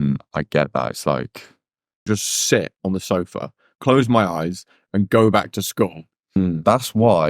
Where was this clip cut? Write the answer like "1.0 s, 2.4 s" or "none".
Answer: 2.1 s, 6.4 s